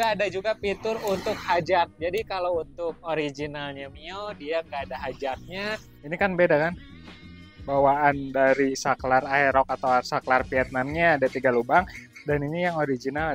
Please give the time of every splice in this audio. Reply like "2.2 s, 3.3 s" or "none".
5.9 s